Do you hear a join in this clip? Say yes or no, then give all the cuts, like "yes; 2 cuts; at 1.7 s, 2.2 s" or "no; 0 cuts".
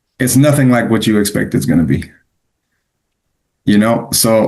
no; 0 cuts